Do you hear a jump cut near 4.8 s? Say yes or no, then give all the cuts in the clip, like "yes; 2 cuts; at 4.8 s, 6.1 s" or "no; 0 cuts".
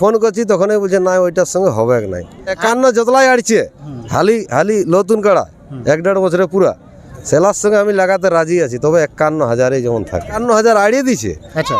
no; 2 cuts; at 2.6 s, 10.3 s